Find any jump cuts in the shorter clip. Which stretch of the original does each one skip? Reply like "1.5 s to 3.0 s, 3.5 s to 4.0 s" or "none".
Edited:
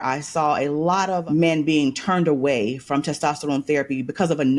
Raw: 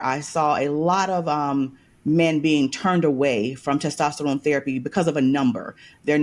1.2 s to 2.0 s